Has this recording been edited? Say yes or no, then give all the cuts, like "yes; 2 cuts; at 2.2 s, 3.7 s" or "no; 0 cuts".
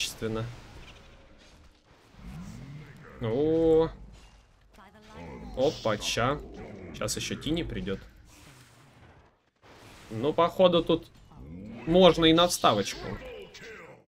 no; 0 cuts